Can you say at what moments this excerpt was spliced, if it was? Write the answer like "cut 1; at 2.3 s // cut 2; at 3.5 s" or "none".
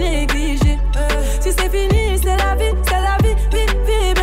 none